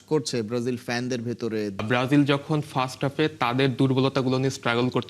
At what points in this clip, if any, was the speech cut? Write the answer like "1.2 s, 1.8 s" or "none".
1.8 s

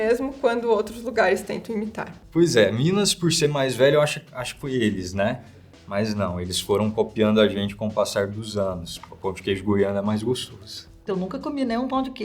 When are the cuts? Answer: 2.2 s

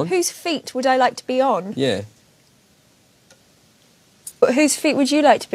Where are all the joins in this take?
4.4 s

